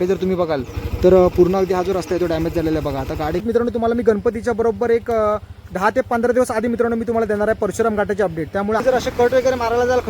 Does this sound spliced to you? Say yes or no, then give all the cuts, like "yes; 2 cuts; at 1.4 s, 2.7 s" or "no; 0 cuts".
yes; 3 cuts; at 3.4 s, 5.6 s, 8.8 s